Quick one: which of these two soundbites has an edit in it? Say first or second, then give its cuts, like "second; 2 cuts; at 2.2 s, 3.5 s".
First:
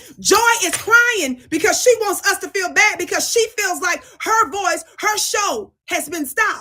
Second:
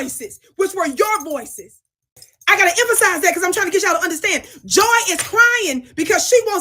second; 1 cut; at 2.3 s